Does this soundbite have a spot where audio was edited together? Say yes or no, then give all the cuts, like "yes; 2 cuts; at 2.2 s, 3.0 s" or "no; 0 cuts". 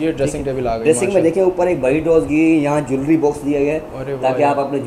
no; 0 cuts